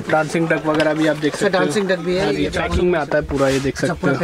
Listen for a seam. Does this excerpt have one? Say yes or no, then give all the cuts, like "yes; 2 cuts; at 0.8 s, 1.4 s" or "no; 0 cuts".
yes; 1 cut; at 2.6 s